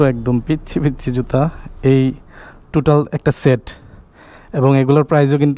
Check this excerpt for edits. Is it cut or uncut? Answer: uncut